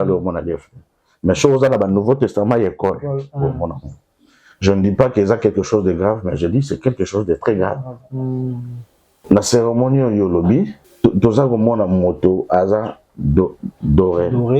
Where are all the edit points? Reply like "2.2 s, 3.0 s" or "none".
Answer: 9.1 s